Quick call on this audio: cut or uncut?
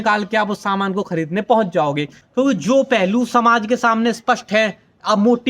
cut